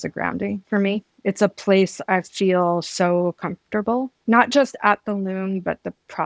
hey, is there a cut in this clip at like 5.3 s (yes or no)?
no